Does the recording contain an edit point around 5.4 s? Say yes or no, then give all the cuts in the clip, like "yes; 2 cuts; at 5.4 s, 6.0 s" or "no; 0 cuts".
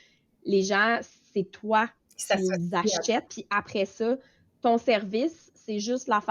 no; 1 cut; at 3.4 s